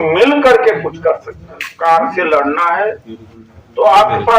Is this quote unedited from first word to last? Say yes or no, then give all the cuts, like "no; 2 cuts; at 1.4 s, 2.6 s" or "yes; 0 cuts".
no; 1 cut; at 1.7 s